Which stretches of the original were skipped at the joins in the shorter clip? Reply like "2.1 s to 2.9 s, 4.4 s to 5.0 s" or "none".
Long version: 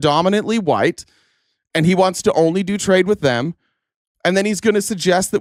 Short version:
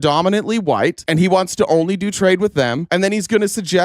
1.0 s to 1.7 s, 3.5 s to 4.1 s